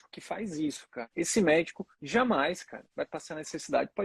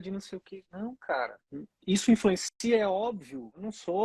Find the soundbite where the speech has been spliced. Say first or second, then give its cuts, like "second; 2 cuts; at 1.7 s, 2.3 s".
first; 1 cut; at 1.0 s